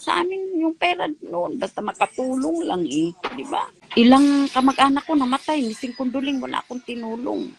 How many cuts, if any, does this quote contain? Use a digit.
1